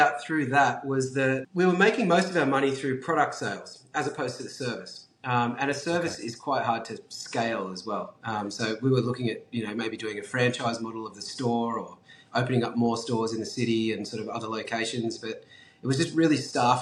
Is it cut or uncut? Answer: cut